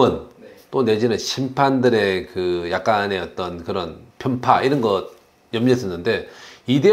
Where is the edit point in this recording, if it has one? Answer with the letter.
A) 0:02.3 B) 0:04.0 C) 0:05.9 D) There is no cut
B